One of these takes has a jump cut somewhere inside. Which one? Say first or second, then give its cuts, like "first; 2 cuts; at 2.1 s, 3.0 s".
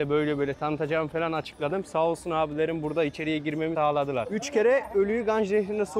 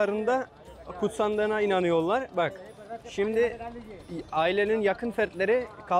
first; 1 cut; at 3.9 s